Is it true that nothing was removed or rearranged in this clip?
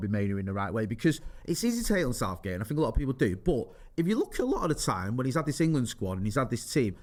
yes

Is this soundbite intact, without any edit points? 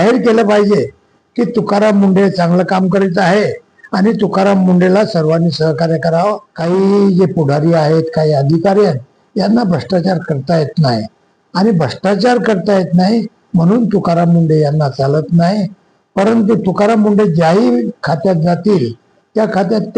no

